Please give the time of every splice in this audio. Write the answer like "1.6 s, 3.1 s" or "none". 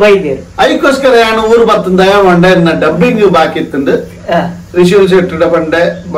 none